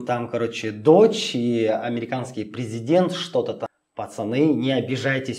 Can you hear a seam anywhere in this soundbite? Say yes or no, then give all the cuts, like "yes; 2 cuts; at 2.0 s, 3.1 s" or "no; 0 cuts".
yes; 1 cut; at 3.7 s